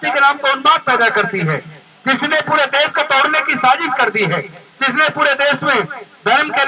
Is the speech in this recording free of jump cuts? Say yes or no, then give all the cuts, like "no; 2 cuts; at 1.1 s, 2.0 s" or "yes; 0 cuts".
yes; 0 cuts